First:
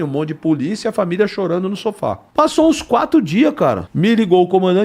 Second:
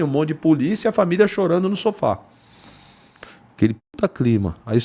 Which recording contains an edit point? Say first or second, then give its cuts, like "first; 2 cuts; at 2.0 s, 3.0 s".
first; 2 cuts; at 2.2 s, 3.9 s